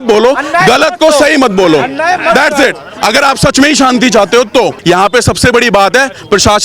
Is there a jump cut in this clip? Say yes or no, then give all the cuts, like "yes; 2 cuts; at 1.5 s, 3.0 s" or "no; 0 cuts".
yes; 1 cut; at 4.8 s